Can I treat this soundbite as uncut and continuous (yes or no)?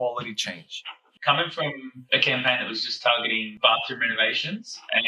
no